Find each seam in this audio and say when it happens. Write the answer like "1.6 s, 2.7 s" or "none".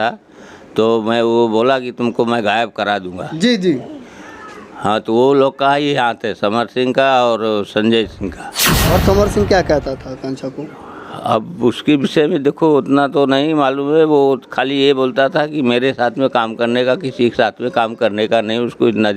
8.7 s